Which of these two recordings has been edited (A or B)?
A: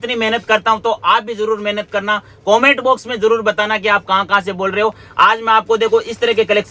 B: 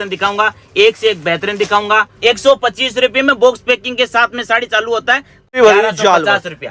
B